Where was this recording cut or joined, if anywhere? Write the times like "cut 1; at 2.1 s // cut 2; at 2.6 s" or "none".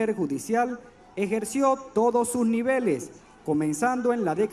none